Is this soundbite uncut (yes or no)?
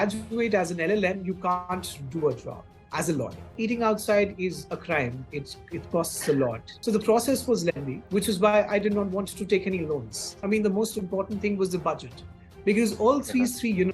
no